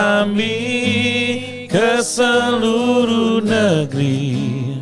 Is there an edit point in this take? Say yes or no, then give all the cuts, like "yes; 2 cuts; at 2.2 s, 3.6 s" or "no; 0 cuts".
no; 0 cuts